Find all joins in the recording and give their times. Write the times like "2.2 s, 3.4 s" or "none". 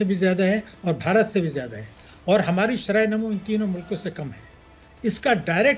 none